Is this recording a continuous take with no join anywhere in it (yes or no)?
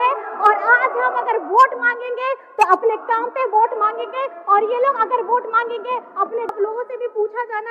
no